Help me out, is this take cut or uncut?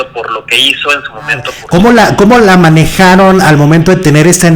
cut